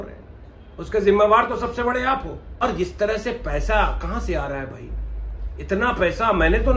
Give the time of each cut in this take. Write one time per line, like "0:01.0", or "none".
0:02.6